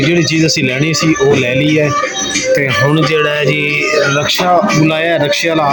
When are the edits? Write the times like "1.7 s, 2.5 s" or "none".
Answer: none